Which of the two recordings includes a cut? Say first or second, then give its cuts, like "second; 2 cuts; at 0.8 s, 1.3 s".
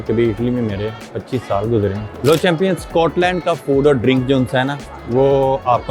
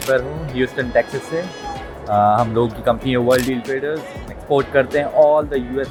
first; 1 cut; at 2.1 s